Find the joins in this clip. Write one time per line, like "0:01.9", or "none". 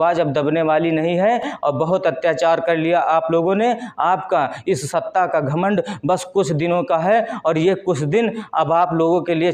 none